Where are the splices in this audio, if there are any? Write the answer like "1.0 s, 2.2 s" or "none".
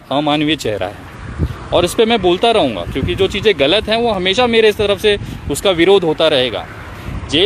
none